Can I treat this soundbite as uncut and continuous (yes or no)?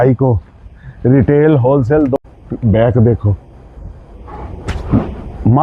no